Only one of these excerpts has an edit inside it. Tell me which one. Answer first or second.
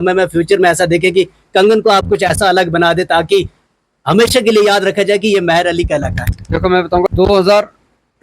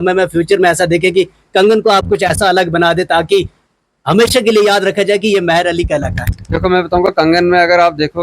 first